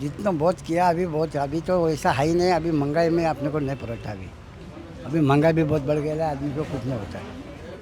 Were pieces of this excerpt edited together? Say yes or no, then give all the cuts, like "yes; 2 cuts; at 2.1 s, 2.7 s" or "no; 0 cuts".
no; 0 cuts